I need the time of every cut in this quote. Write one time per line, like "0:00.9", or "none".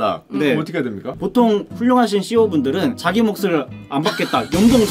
0:01.1